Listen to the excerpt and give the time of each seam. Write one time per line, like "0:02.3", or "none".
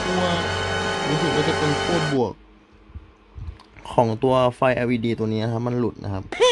none